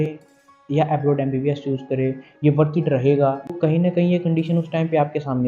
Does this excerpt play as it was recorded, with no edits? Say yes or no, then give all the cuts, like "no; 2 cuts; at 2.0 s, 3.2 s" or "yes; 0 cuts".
no; 1 cut; at 3.5 s